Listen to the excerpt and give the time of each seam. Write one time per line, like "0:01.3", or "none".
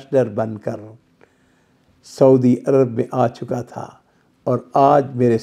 none